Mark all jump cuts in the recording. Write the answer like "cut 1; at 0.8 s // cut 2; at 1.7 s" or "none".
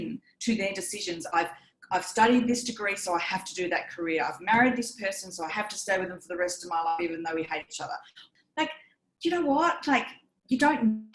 cut 1; at 8.2 s